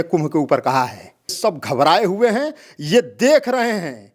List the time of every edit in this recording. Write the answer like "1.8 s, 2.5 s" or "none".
1.4 s